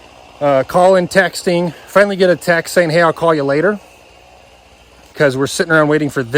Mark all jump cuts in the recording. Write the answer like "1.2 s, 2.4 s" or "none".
4.6 s